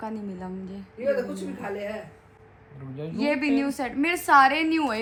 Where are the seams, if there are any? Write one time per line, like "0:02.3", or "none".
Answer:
none